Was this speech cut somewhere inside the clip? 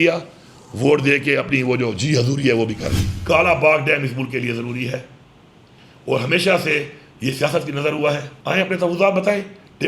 yes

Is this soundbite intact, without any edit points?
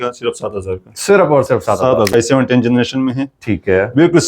no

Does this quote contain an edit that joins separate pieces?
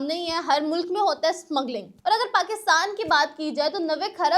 yes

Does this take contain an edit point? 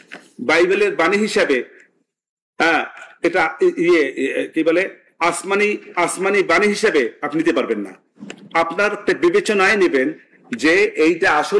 no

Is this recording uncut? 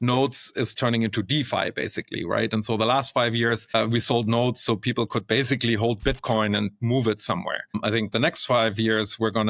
yes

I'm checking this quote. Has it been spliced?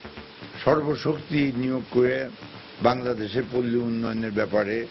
no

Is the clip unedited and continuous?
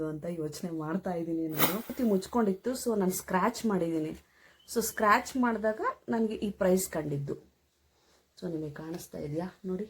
no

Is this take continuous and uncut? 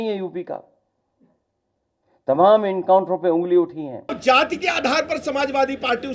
no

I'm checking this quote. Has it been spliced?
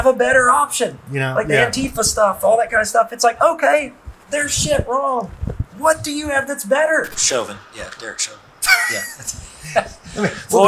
yes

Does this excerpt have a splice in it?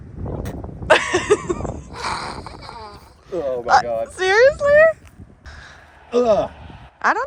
no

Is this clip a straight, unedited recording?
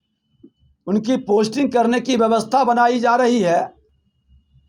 yes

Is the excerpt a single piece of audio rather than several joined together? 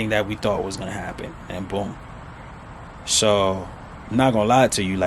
yes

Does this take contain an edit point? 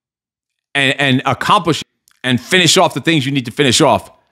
yes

